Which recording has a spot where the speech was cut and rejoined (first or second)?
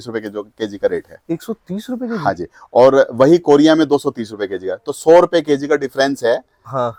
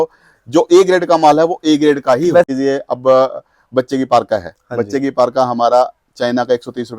second